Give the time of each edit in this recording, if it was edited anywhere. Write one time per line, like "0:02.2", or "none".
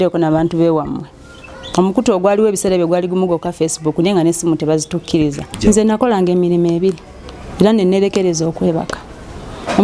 0:05.5